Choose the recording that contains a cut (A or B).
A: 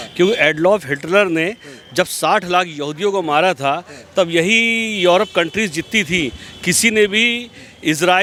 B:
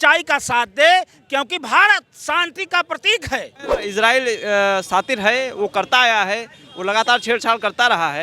B